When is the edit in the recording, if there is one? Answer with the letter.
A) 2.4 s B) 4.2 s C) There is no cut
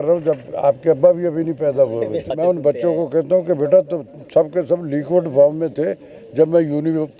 A